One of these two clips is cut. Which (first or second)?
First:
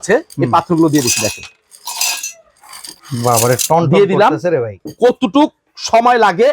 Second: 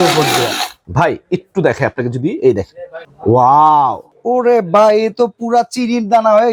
first